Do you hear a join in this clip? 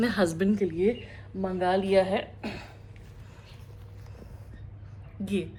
no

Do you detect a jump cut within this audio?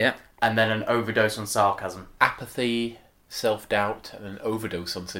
yes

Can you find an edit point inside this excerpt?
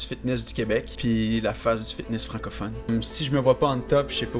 yes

